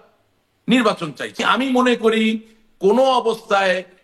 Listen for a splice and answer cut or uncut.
cut